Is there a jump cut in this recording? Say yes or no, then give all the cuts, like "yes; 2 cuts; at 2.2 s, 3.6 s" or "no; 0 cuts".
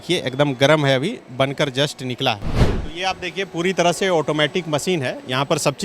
yes; 1 cut; at 2.8 s